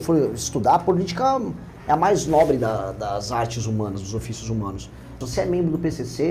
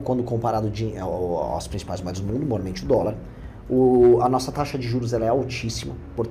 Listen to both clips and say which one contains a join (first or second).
first